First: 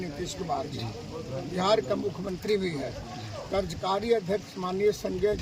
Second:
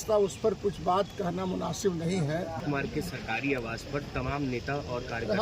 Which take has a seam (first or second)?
second